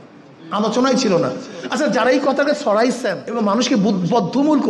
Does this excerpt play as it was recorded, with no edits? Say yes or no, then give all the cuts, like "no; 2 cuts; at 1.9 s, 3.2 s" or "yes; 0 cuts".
no; 1 cut; at 3.2 s